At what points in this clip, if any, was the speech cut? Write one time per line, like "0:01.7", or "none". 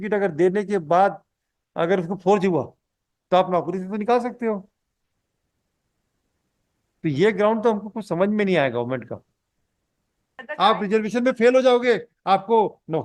0:10.4

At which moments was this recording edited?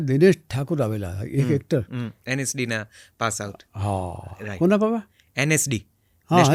none

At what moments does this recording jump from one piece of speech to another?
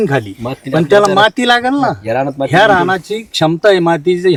none

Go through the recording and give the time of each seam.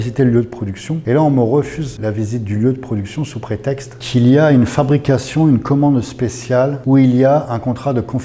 0:00.9
0:01.8
0:03.9
0:06.8

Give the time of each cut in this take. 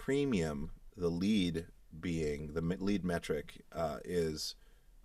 none

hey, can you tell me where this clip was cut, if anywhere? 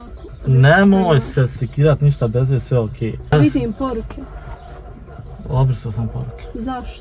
0:03.3

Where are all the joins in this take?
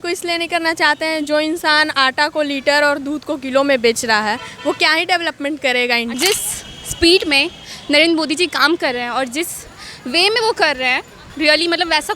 0:06.2
0:11.2

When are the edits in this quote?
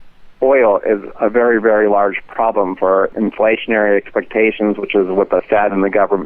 0:03.1

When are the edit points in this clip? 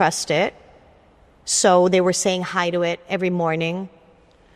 none

